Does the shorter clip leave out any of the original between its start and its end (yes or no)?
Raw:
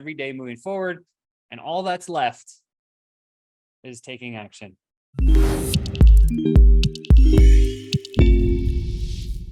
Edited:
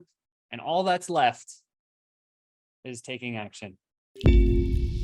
yes